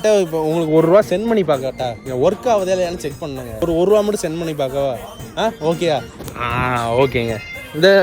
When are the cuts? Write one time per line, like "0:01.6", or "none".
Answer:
0:06.2

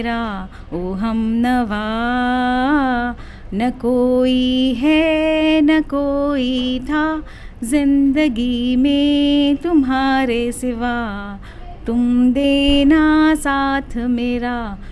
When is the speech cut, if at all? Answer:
none

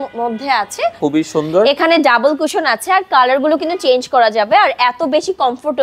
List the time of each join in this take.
0:01.0

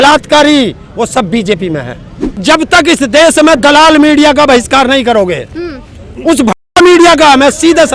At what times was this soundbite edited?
0:02.2

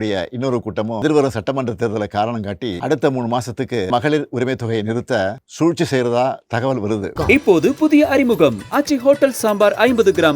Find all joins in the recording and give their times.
0:01.0
0:02.8
0:03.9
0:05.4
0:07.1

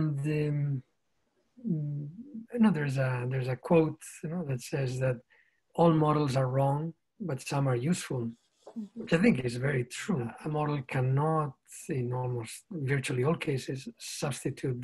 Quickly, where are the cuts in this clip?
0:10.4

